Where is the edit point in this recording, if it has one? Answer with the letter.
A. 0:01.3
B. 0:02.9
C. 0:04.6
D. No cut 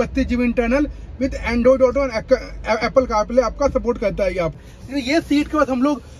C